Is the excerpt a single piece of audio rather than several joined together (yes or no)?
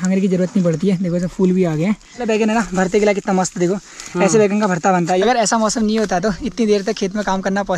no